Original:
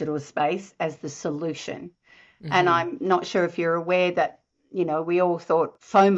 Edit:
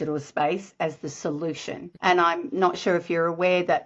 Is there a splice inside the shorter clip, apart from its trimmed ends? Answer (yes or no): yes